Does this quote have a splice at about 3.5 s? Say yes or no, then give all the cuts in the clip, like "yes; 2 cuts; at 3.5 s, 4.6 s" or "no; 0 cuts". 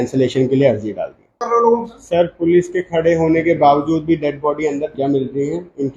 no; 2 cuts; at 1.4 s, 4.9 s